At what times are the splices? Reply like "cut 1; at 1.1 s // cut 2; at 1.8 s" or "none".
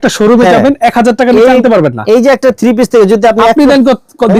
none

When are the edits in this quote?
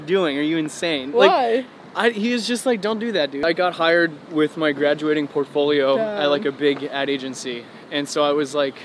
cut 1; at 3.4 s

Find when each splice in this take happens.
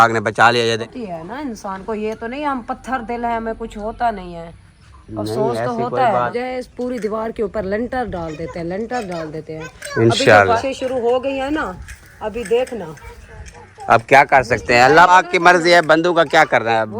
cut 1; at 0.9 s // cut 2; at 6.3 s // cut 3; at 10.6 s // cut 4; at 15.1 s

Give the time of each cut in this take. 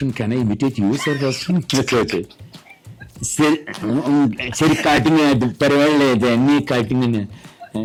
none

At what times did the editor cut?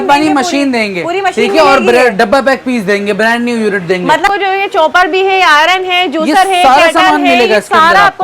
cut 1; at 4.2 s

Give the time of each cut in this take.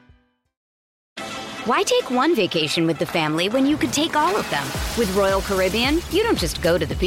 none

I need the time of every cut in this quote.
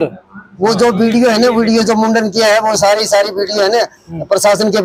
none

